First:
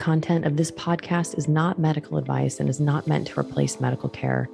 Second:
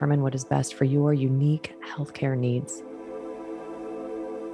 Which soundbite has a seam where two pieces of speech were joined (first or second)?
second